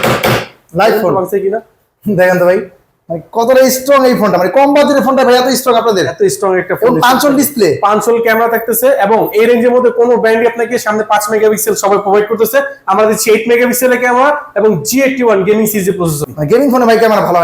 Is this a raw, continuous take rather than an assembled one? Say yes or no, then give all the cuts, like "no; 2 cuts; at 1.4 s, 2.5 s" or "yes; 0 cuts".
no; 1 cut; at 16.2 s